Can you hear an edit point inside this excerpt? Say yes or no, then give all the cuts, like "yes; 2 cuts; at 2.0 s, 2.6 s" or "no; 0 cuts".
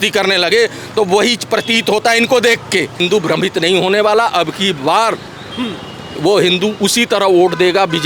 yes; 1 cut; at 3.0 s